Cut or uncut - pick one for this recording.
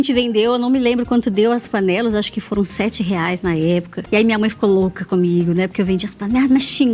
cut